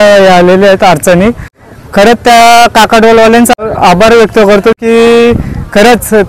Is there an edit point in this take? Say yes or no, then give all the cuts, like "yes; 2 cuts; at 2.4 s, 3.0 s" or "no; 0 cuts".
yes; 2 cuts; at 1.5 s, 3.5 s